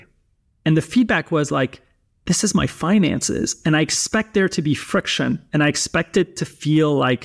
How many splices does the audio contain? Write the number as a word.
zero